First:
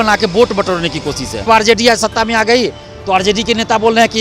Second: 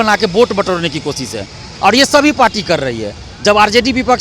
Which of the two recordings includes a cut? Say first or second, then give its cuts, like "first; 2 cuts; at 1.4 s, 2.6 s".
first; 1 cut; at 1.5 s